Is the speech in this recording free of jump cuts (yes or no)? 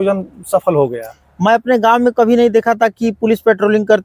yes